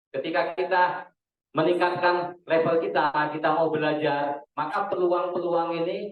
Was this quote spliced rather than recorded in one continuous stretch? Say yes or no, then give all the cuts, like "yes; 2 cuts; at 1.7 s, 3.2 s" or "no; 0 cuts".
no; 0 cuts